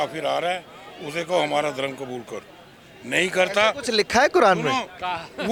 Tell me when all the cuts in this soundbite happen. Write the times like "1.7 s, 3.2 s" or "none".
none